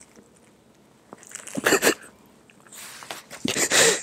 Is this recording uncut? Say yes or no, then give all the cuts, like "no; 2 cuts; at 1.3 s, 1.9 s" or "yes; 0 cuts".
yes; 0 cuts